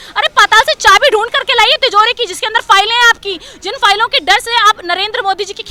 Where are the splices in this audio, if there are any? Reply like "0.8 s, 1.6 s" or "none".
none